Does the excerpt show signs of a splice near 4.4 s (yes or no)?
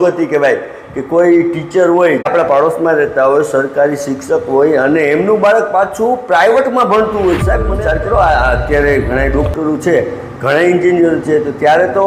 no